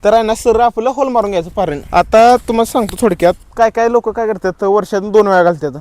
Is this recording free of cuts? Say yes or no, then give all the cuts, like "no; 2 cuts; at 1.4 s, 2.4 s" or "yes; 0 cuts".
no; 1 cut; at 1.8 s